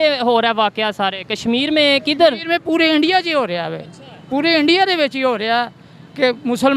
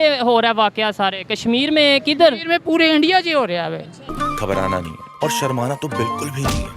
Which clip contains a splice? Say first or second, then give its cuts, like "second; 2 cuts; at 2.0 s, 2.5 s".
first; 1 cut; at 4.1 s